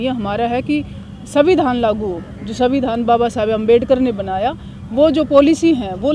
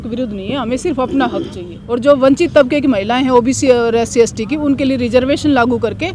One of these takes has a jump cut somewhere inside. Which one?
second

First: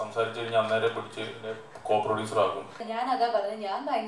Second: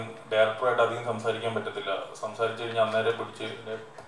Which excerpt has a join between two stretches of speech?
first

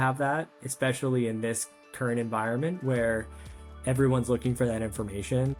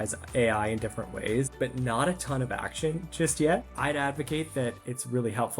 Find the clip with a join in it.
second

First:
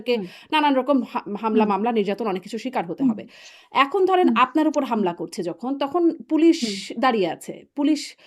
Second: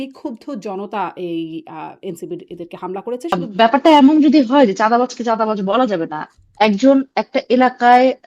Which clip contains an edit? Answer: second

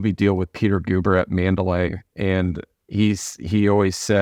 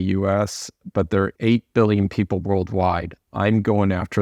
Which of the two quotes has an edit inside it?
second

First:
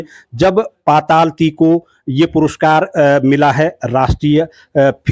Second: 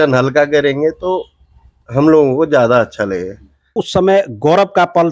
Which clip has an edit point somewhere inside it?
second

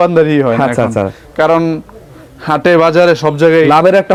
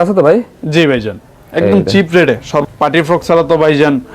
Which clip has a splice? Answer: second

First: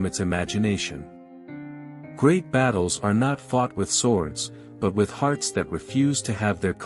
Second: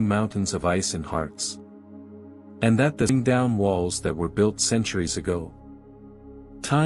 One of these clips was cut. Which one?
second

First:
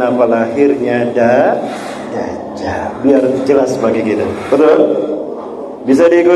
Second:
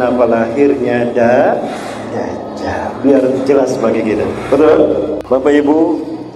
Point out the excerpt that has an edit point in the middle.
second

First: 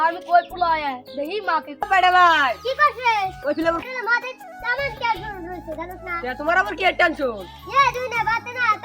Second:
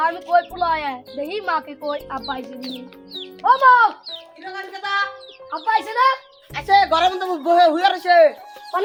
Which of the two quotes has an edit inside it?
first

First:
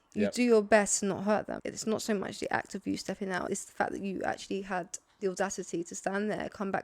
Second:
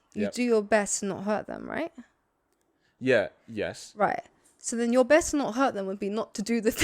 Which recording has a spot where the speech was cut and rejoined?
first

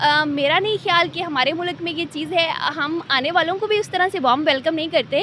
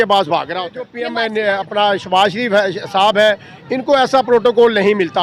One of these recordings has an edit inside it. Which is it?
second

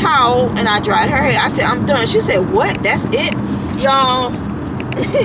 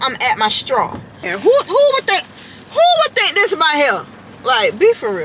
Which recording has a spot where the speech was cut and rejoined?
second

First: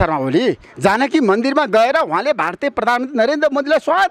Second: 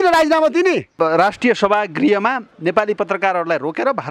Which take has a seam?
second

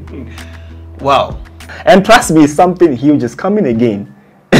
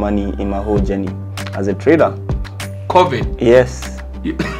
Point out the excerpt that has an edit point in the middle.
first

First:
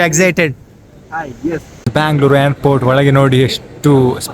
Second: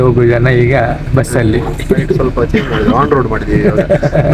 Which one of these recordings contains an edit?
first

